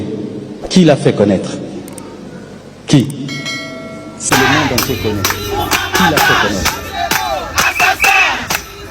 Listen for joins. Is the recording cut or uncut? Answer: cut